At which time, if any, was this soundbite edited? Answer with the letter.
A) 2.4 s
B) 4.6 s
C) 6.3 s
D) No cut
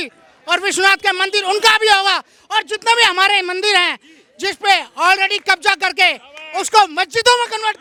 D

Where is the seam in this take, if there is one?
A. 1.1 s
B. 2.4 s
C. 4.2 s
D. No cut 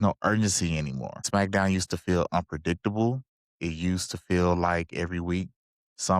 A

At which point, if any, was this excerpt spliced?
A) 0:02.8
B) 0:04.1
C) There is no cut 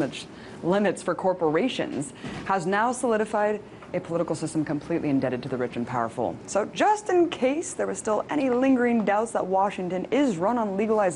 B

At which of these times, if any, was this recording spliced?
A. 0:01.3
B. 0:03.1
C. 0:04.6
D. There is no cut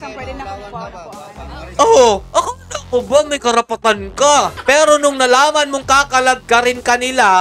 C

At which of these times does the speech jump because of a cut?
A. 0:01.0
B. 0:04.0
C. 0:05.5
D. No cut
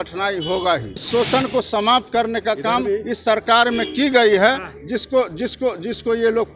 A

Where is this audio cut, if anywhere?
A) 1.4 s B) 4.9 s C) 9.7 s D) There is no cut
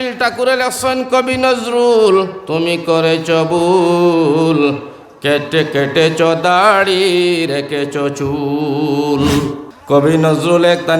C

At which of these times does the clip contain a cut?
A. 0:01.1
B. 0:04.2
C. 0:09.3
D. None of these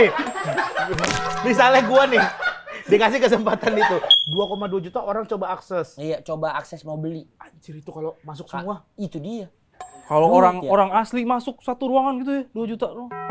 B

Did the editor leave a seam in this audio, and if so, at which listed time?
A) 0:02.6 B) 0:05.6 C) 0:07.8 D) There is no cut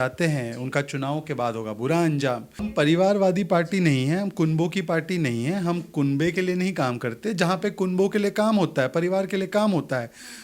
A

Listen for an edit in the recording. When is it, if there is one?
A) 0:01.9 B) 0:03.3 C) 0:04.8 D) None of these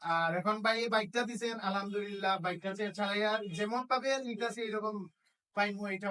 D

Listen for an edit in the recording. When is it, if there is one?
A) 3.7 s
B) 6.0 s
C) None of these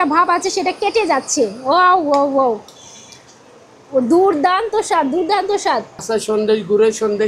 B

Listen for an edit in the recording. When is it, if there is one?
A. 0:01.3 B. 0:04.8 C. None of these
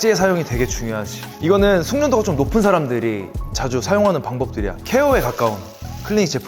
B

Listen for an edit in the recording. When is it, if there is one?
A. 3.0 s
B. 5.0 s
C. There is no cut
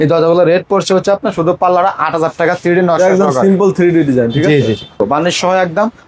B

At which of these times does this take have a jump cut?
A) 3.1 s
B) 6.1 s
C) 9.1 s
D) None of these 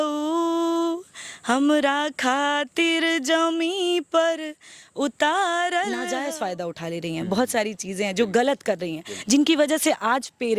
B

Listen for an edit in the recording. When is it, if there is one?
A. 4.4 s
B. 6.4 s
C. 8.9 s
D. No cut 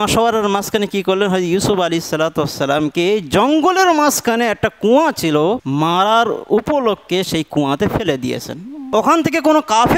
C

